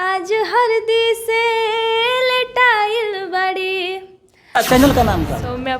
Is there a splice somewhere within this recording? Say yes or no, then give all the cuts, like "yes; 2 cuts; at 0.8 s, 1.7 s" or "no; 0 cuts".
yes; 1 cut; at 4.6 s